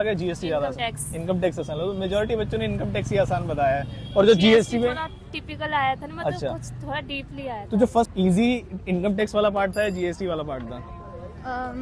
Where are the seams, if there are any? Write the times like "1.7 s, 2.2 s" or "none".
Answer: 8.1 s